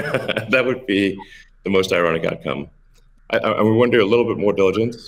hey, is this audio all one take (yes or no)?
no